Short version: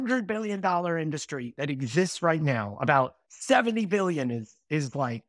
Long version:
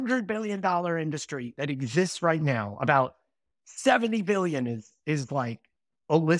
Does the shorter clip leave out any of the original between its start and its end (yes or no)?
yes